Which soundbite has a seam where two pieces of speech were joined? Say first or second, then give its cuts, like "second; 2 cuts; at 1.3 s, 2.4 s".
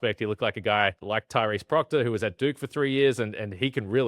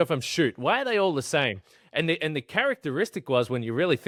first; 1 cut; at 1.0 s